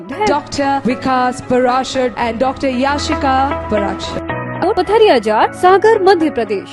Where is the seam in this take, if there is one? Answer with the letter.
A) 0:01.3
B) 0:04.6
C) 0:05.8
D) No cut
B